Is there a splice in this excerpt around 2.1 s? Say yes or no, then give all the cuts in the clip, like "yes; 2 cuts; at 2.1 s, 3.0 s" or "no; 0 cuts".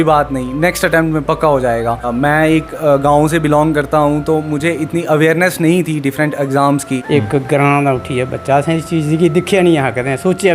yes; 2 cuts; at 2.1 s, 7.0 s